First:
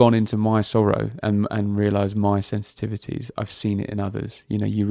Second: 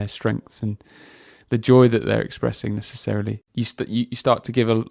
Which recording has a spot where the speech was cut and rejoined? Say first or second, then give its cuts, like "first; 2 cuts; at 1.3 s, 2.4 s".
second; 1 cut; at 3.4 s